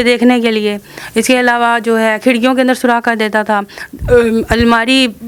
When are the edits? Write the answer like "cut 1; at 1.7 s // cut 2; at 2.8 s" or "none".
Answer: none